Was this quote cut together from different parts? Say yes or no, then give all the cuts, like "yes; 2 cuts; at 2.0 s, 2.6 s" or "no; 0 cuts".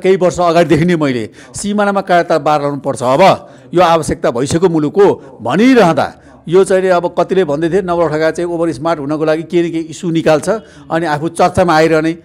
no; 0 cuts